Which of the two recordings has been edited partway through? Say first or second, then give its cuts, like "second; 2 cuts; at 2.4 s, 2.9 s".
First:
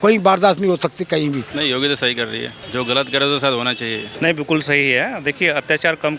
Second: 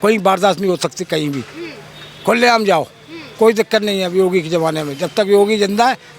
first; 3 cuts; at 1.5 s, 2.6 s, 4.1 s